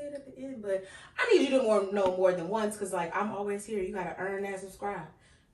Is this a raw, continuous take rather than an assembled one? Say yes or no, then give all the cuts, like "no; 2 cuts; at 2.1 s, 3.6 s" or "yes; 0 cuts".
yes; 0 cuts